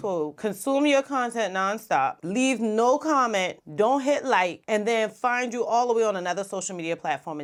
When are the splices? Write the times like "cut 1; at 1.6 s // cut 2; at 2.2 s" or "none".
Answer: none

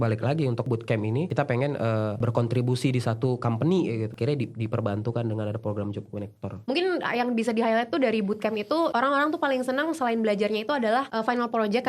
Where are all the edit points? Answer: cut 1; at 1.3 s // cut 2; at 4.1 s // cut 3; at 6.7 s // cut 4; at 8.9 s

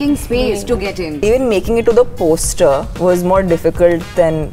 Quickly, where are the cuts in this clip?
cut 1; at 1.1 s // cut 2; at 2.9 s

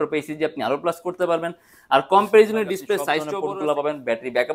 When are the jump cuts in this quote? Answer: cut 1; at 3.2 s

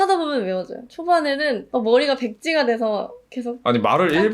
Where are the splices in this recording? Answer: cut 1; at 1.6 s

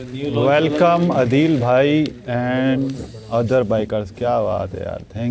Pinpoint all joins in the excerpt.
none

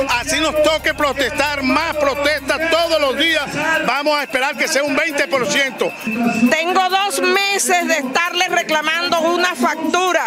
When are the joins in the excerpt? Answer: cut 1; at 6.1 s

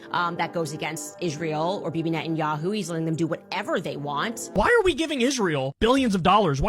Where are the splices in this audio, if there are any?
cut 1; at 4.5 s

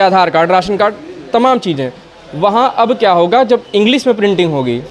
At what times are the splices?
none

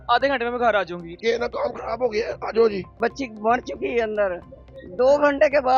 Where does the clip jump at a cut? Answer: cut 1; at 1.0 s // cut 2; at 2.9 s

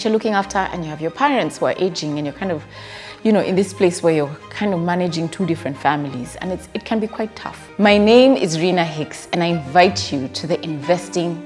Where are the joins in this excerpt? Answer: cut 1; at 7.6 s

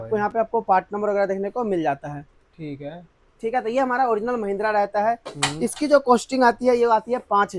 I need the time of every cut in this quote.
none

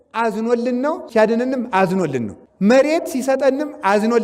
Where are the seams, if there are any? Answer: cut 1; at 1.0 s // cut 2; at 2.4 s

